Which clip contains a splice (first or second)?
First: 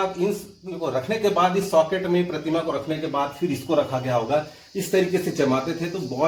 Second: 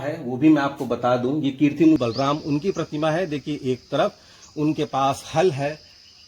second